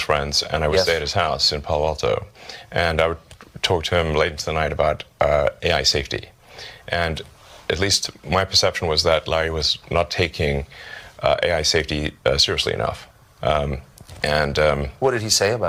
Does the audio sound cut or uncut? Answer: uncut